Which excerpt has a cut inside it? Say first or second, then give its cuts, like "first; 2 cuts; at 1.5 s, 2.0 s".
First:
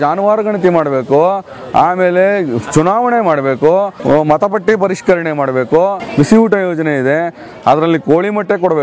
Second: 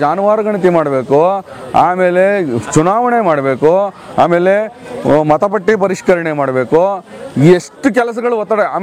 first; 2 cuts; at 3.9 s, 6.0 s